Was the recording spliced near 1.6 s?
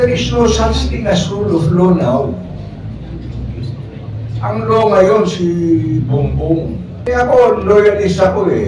no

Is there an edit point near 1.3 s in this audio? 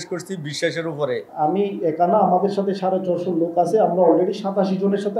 yes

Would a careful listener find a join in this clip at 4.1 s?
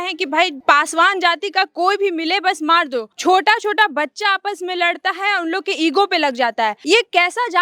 no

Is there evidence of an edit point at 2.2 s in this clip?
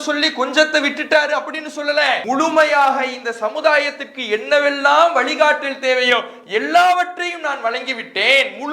yes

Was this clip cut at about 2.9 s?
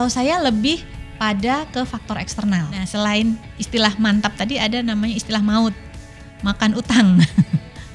yes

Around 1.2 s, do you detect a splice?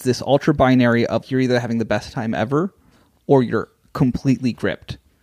yes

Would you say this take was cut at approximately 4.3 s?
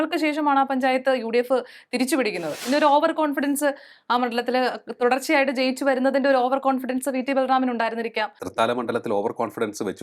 no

